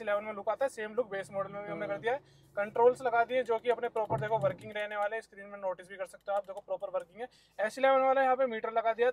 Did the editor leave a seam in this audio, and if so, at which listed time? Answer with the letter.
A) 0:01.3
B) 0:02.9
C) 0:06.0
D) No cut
D